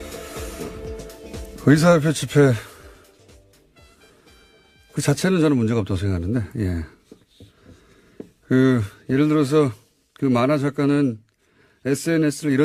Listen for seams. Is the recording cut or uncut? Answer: uncut